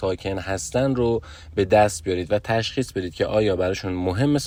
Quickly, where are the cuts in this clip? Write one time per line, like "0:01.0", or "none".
none